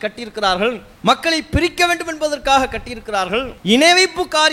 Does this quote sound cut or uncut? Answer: cut